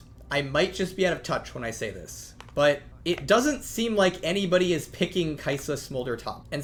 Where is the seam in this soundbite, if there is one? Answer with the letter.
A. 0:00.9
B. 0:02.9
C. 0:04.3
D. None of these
D